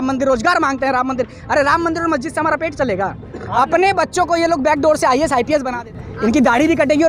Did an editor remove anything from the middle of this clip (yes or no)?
yes